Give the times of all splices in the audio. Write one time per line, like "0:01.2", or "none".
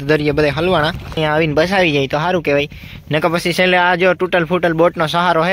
0:01.2